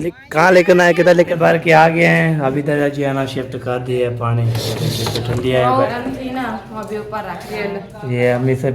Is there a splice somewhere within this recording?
yes; 2 cuts; at 1.3 s, 5.9 s

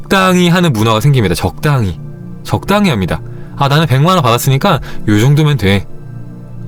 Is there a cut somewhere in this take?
no; 0 cuts

